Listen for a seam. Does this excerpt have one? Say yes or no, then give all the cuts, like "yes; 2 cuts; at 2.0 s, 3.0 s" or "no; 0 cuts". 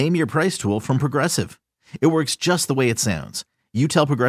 no; 0 cuts